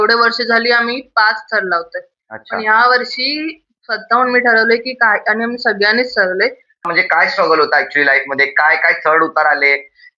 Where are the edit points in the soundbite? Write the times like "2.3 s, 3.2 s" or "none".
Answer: 6.8 s